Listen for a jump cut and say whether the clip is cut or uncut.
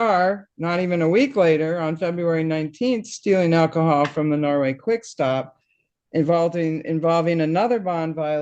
uncut